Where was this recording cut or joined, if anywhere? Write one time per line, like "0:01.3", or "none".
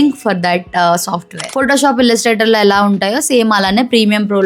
0:01.5